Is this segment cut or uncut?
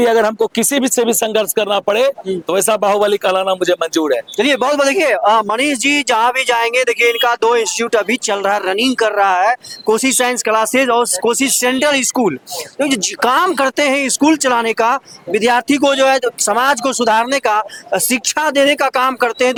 uncut